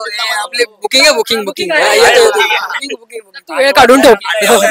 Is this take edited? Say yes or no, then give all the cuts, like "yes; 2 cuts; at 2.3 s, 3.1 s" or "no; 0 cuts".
no; 0 cuts